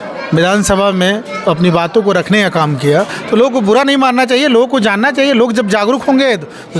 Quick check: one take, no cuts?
yes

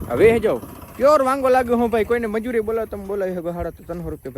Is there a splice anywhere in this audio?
no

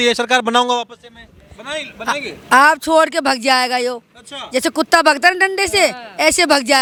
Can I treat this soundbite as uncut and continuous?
yes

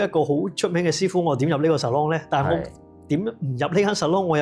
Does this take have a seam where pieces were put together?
no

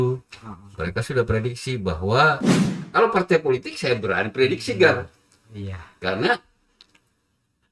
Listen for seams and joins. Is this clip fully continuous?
no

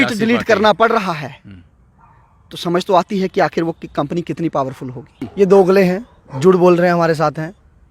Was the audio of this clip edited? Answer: yes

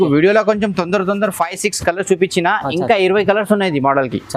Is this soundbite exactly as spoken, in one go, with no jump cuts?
yes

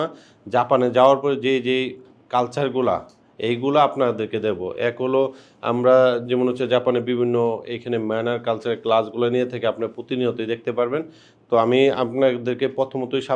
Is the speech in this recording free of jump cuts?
yes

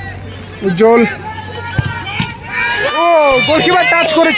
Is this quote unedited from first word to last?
yes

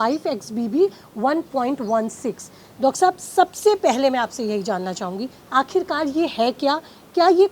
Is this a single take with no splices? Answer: yes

